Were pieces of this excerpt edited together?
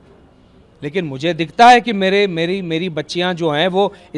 no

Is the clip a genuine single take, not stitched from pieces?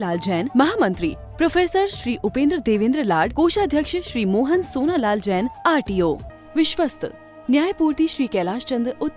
no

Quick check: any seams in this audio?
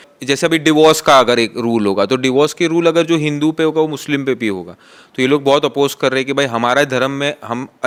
no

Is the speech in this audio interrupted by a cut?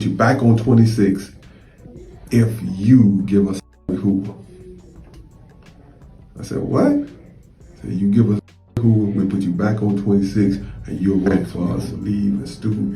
yes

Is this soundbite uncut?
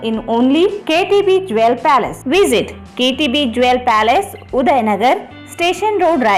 yes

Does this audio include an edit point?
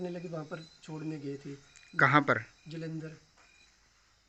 no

